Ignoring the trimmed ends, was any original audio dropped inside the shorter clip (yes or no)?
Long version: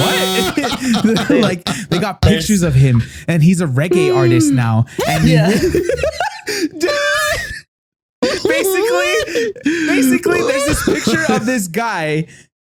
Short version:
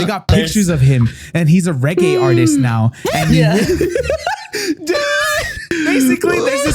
yes